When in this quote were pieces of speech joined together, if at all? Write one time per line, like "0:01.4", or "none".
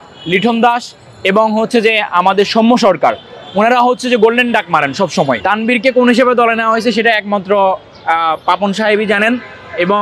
0:05.4